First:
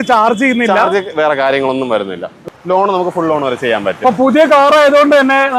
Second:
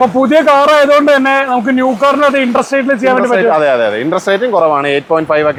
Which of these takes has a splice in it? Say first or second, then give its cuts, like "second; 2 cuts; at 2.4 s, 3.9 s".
first; 1 cut; at 2.5 s